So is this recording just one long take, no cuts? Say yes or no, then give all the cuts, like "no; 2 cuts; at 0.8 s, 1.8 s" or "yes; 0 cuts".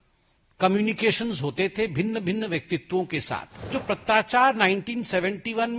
no; 1 cut; at 3.7 s